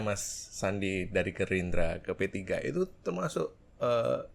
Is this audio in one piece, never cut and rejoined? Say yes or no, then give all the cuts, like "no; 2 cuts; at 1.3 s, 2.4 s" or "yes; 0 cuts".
yes; 0 cuts